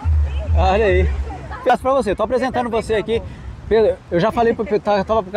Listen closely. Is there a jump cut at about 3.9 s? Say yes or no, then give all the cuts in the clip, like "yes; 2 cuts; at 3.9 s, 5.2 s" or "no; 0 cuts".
no; 1 cut; at 1.7 s